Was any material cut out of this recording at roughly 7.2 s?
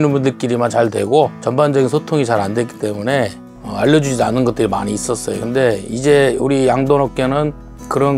no; 2 cuts; at 1.4 s, 3.4 s

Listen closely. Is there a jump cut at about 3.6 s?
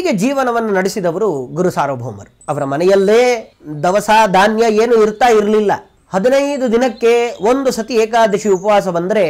no; 2 cuts; at 2.4 s, 5.9 s

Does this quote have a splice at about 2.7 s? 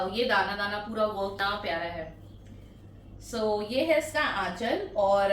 no; 1 cut; at 1.4 s

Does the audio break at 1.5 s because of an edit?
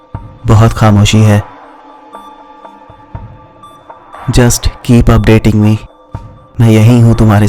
no; 0 cuts

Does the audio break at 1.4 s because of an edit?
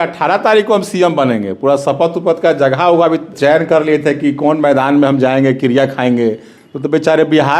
no; 1 cut; at 3.3 s

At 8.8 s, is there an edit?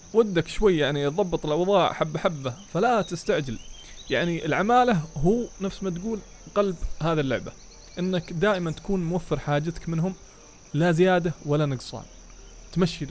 no; 0 cuts

